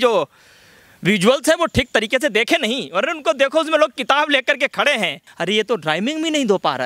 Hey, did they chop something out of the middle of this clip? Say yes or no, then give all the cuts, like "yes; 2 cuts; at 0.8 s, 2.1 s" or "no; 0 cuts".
yes; 1 cut; at 5.2 s